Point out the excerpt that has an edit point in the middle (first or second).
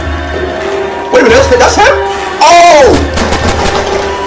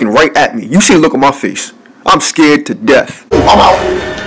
second